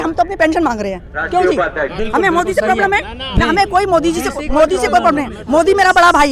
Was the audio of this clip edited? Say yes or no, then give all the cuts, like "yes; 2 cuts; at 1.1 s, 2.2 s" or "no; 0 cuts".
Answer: no; 0 cuts